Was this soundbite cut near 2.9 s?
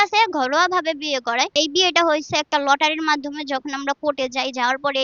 no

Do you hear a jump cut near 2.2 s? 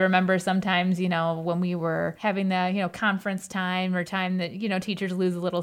yes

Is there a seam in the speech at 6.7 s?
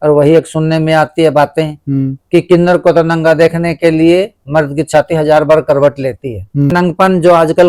yes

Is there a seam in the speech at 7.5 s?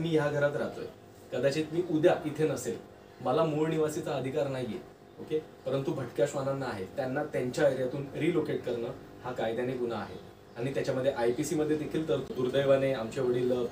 no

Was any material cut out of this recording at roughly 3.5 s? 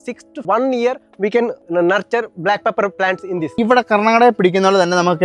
yes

